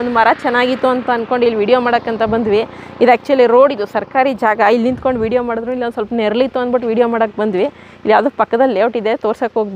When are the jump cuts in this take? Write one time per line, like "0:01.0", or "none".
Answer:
none